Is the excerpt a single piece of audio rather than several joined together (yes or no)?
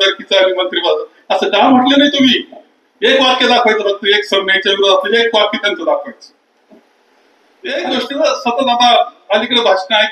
no